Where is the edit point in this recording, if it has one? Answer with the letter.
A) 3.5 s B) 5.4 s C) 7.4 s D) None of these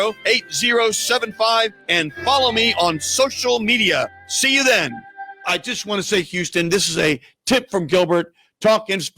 B